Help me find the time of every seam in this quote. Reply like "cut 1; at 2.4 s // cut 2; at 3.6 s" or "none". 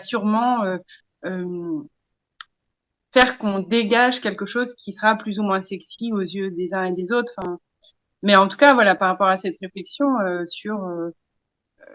none